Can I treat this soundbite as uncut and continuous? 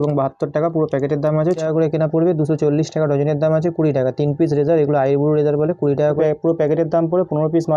no; 2 cuts; at 1.6 s, 6.2 s

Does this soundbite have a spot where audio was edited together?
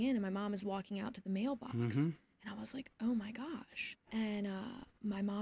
yes; 1 cut; at 4.0 s

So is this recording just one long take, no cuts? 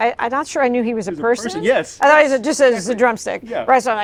yes; 0 cuts

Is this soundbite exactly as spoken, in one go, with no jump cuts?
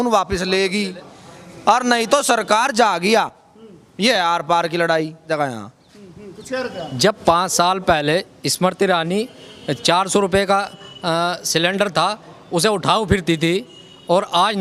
yes; 0 cuts

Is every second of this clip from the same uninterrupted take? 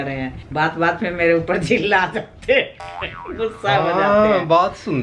yes; 0 cuts

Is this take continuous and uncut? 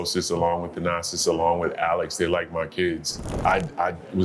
no; 1 cut; at 3.2 s

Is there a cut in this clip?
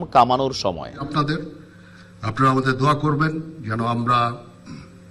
yes; 1 cut; at 1.1 s

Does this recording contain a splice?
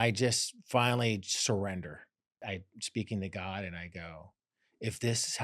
yes; 1 cut; at 2.4 s

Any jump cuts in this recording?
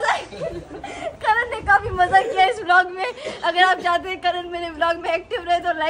no; 0 cuts

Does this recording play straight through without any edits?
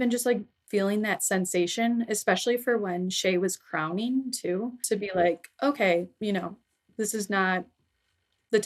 yes; 0 cuts

